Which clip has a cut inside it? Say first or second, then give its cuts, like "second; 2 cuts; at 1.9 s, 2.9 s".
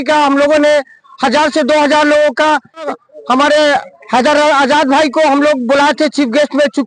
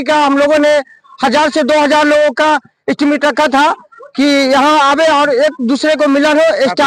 first; 1 cut; at 2.9 s